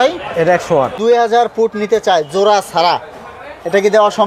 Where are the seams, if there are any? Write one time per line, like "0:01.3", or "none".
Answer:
0:01.0